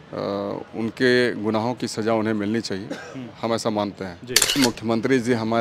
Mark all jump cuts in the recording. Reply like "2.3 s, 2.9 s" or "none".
4.6 s